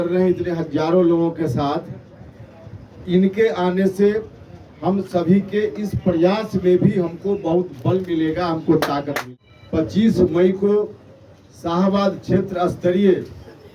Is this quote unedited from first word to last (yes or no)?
no